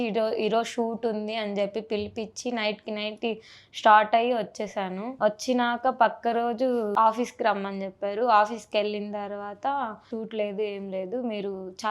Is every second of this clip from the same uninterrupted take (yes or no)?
no